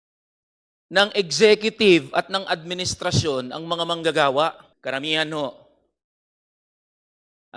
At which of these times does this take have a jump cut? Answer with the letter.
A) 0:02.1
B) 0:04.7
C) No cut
B